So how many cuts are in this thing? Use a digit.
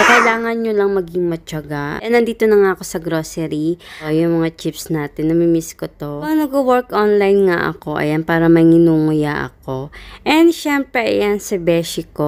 3